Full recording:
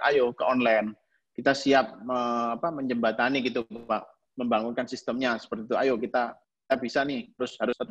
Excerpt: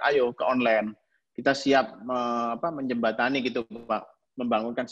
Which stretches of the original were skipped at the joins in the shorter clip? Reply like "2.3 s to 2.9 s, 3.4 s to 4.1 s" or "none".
none